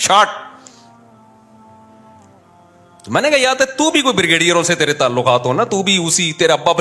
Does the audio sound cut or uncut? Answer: uncut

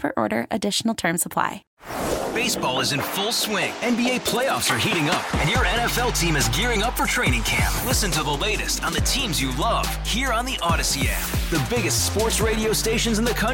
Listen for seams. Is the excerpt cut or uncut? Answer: cut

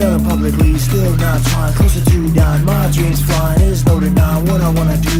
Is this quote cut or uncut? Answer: uncut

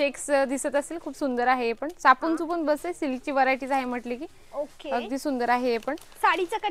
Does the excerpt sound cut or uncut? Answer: uncut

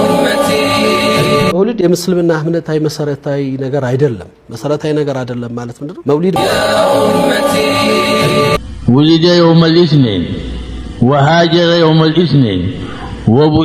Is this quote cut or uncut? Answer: cut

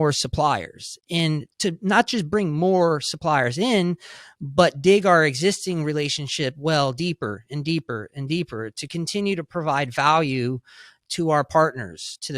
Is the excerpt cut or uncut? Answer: cut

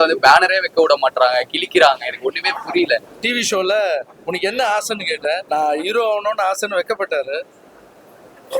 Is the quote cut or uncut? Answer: cut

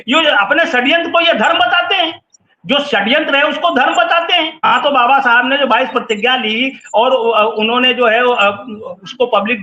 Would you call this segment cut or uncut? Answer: cut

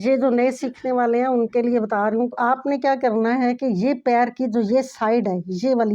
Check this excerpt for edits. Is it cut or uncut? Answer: cut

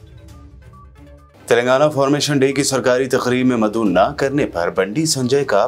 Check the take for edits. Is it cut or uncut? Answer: cut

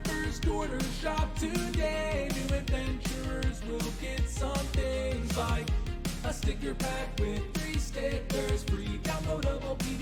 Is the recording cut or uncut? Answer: uncut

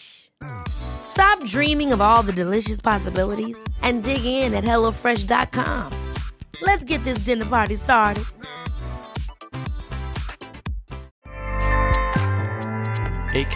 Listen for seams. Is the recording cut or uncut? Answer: uncut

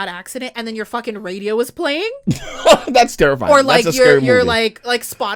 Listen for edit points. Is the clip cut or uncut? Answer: uncut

